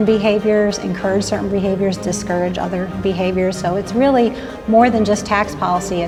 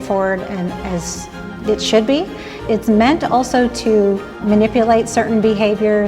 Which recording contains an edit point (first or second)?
second